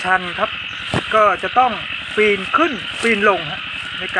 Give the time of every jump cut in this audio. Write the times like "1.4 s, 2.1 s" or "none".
none